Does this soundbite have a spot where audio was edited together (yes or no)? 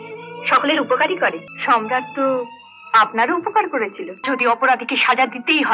yes